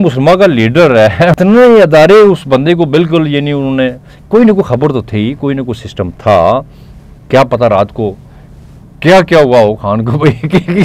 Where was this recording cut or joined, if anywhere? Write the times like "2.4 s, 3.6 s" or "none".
1.3 s